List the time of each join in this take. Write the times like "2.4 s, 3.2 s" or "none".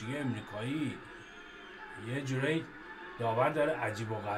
none